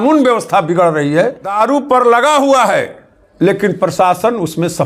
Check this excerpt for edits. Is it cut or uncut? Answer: cut